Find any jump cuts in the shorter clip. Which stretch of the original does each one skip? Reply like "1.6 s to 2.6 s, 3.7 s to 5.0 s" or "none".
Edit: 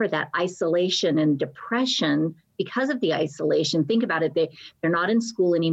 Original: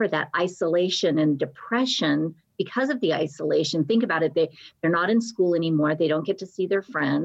none